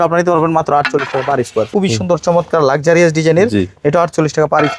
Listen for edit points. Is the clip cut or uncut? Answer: cut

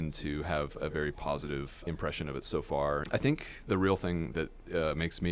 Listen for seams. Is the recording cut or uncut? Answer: cut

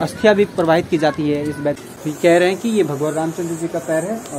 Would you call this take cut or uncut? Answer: cut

